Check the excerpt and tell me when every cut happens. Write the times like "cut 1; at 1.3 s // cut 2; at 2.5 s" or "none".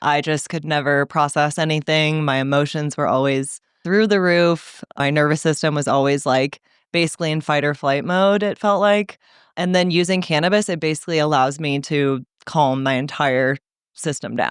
cut 1; at 3.8 s // cut 2; at 5.0 s // cut 3; at 9.4 s